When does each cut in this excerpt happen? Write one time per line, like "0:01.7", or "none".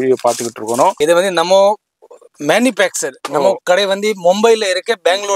0:01.0